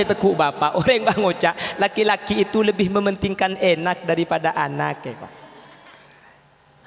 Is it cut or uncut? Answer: uncut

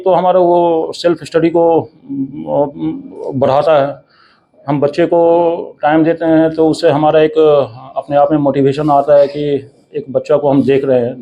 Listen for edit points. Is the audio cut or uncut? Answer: uncut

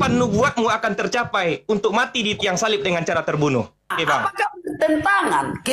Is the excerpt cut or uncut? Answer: cut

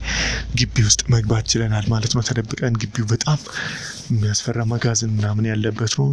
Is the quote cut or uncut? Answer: uncut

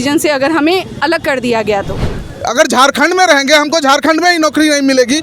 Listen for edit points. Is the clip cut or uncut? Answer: cut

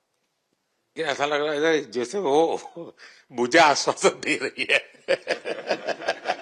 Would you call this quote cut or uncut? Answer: cut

